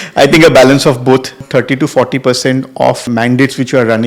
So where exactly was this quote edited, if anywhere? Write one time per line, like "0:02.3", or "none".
0:01.4
0:03.0